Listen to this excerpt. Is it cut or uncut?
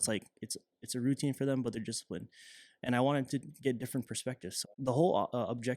cut